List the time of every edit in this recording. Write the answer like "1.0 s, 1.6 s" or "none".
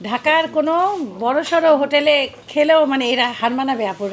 none